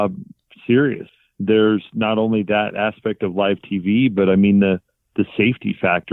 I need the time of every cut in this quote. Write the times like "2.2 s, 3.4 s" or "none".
1.1 s